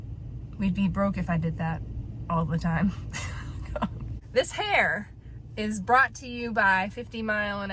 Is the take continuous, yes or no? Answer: no